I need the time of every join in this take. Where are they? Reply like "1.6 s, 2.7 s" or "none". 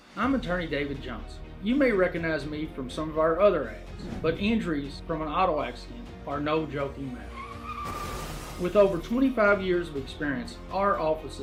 none